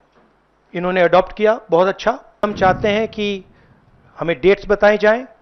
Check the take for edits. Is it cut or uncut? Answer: cut